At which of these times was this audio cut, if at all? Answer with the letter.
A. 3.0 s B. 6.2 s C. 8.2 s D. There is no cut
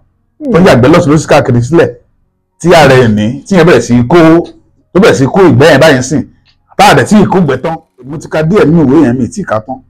C